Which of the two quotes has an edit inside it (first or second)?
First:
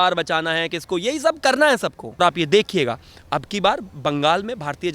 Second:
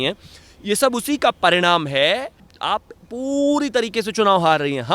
first